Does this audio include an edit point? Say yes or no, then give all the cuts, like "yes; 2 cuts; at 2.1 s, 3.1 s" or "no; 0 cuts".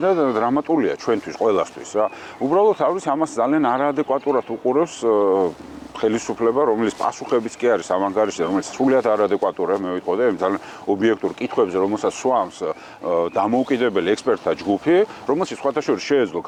no; 0 cuts